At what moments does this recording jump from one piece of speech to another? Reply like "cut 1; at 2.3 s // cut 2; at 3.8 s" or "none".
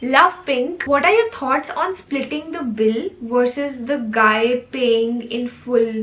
cut 1; at 0.9 s